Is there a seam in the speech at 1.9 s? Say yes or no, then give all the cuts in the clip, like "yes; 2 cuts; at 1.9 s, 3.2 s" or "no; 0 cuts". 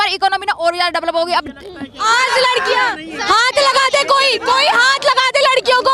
yes; 1 cut; at 1.9 s